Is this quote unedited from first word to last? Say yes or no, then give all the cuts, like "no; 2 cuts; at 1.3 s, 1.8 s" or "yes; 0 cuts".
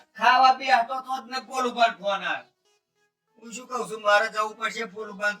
yes; 0 cuts